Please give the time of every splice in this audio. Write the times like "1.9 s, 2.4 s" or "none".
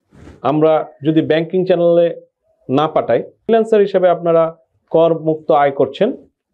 3.5 s

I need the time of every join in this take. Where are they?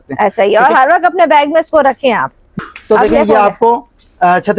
2.5 s

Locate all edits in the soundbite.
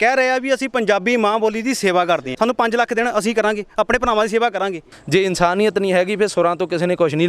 2.3 s, 4.9 s

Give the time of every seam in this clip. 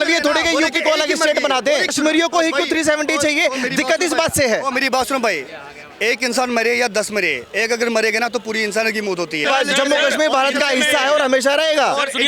1.9 s, 9.5 s

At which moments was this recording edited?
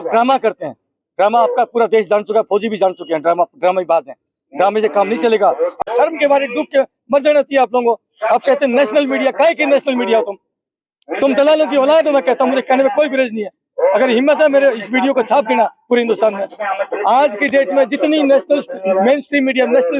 5.8 s

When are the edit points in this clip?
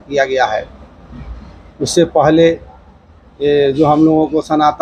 none

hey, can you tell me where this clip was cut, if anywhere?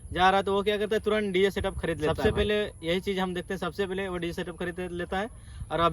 2.1 s

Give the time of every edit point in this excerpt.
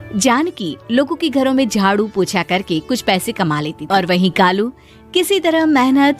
3.8 s

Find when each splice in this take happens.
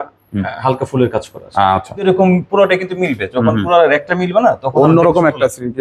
2.0 s

